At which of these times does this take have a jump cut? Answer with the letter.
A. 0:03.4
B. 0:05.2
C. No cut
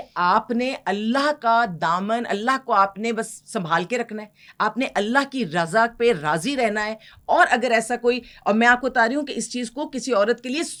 C